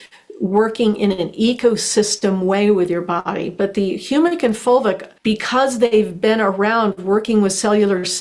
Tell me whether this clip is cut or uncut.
cut